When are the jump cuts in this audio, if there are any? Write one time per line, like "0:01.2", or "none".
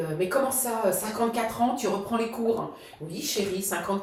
none